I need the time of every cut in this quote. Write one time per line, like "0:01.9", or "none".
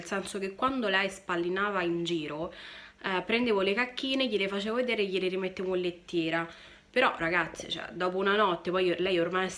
none